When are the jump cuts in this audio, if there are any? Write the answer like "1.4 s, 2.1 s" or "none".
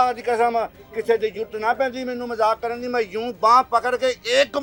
none